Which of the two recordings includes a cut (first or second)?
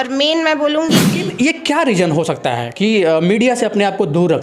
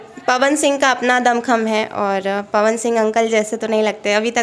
first